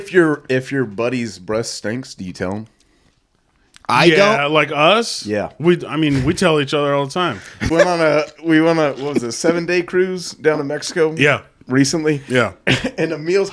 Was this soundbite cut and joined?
yes; 1 cut; at 7.7 s

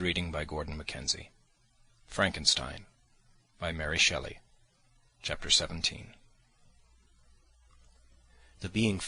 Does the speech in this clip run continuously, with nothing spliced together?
yes; 0 cuts

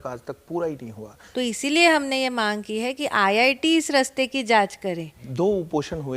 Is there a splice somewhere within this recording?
yes; 2 cuts; at 1.2 s, 5.2 s

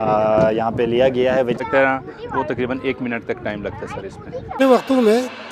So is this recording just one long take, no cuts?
no; 2 cuts; at 1.6 s, 4.6 s

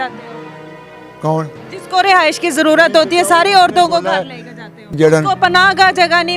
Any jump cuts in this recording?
yes; 1 cut; at 4.9 s

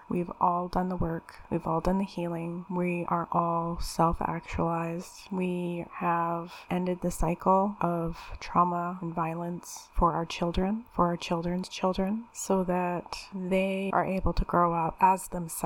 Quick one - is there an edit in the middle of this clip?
no; 0 cuts

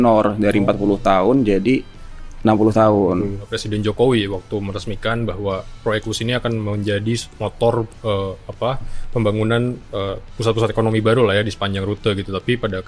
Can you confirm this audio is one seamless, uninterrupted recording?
no; 1 cut; at 3.5 s

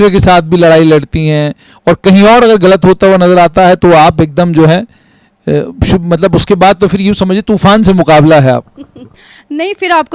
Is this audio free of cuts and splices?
yes; 0 cuts

